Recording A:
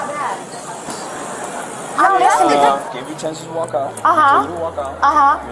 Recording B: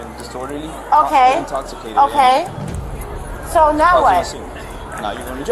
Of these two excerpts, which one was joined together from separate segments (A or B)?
A